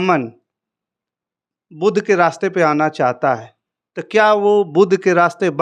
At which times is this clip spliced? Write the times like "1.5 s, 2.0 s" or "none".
none